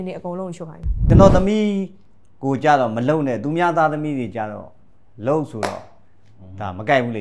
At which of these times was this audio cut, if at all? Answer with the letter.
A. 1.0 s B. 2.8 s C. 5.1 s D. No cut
A